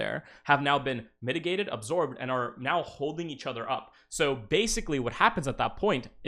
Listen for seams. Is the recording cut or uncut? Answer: uncut